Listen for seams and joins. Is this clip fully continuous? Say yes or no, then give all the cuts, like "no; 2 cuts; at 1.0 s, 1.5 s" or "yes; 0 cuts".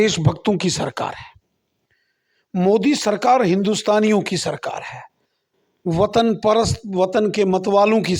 yes; 0 cuts